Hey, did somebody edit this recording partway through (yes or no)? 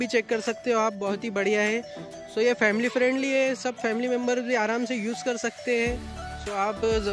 no